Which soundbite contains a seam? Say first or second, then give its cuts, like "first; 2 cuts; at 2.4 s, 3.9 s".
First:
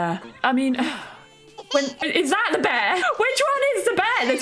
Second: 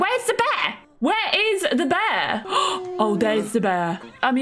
second; 1 cut; at 2.4 s